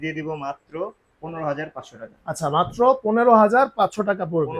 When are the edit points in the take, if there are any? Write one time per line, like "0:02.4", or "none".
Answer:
none